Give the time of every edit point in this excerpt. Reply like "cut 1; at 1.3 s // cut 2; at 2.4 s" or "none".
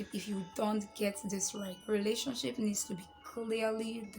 cut 1; at 1.7 s